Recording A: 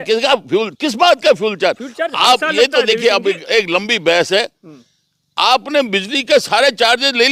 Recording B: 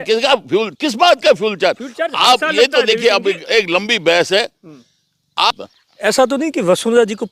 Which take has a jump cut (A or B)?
B